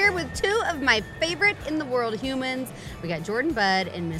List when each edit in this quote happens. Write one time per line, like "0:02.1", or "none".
none